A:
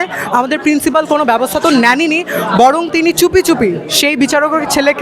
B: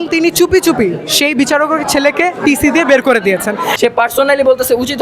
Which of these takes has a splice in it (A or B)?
B